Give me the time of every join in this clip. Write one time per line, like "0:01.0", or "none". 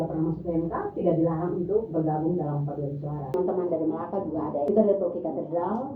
0:03.3
0:04.7